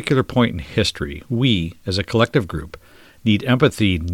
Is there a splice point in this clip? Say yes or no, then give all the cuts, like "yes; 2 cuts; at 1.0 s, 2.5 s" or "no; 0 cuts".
no; 0 cuts